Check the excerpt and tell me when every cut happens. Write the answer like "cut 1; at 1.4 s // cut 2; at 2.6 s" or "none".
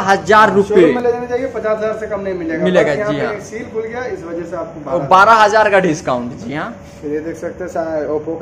none